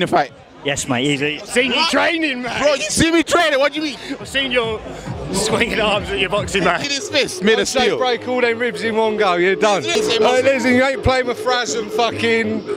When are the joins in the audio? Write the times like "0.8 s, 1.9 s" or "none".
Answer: 6.9 s, 9.9 s